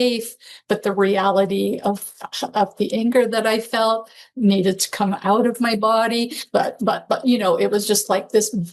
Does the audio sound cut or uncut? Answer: uncut